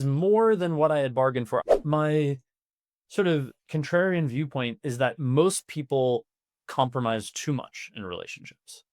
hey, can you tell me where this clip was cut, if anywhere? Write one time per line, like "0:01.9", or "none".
0:01.6